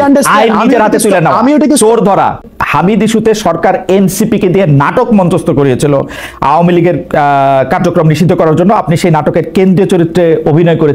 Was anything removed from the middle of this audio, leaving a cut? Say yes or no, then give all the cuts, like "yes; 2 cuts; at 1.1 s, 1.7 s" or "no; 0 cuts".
yes; 1 cut; at 2.5 s